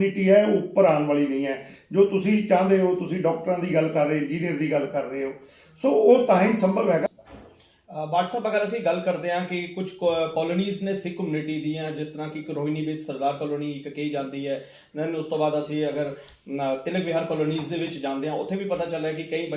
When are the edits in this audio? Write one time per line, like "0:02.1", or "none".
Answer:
0:07.1